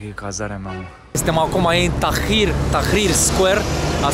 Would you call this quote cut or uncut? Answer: cut